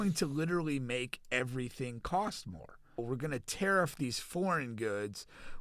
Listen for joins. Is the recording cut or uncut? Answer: cut